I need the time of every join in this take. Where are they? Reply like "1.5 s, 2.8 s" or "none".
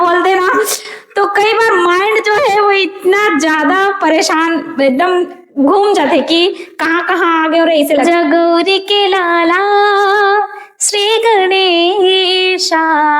8.0 s